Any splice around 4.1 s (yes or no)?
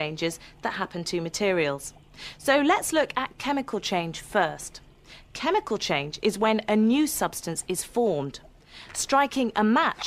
no